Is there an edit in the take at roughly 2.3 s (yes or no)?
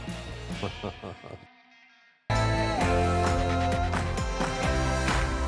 yes